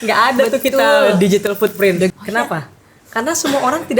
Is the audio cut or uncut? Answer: cut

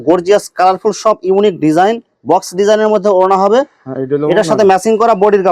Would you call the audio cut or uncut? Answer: uncut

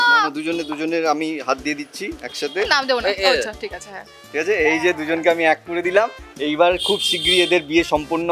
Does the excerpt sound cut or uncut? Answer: uncut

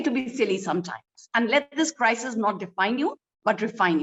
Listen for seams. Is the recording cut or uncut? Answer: uncut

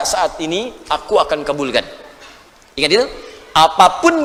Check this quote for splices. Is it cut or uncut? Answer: uncut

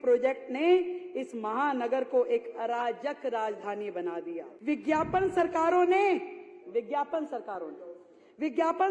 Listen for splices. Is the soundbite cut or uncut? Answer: cut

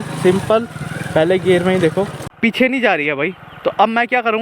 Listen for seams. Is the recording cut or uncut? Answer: cut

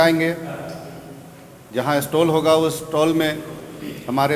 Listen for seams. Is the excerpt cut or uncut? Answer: uncut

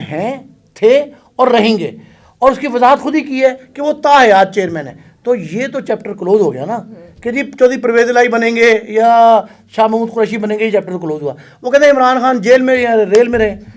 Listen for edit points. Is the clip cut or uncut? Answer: uncut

